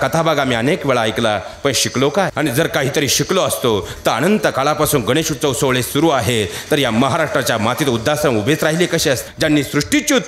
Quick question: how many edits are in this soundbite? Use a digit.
2